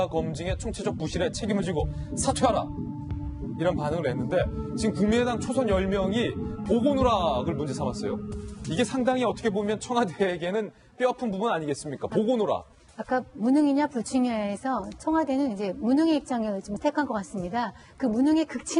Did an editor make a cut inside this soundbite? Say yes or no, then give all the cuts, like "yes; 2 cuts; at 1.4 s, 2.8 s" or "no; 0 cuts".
no; 0 cuts